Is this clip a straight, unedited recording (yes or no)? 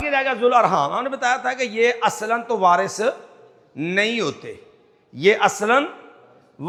yes